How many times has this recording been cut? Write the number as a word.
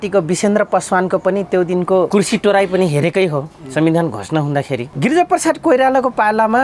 two